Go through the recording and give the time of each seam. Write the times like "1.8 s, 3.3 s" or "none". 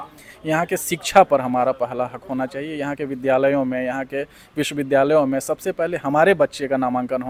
none